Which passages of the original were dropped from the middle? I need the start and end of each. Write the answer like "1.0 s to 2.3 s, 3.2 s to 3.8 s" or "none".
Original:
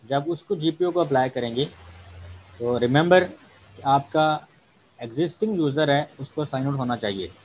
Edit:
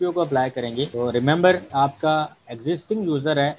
1.7 s to 2.6 s, 3.3 s to 3.8 s, 4.6 s to 5.0 s